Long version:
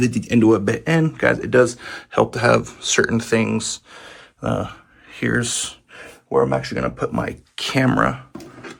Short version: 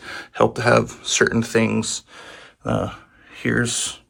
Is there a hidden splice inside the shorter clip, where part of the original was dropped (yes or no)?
no